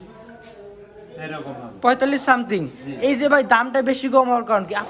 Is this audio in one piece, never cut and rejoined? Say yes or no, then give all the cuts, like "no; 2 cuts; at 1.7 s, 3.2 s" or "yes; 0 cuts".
yes; 0 cuts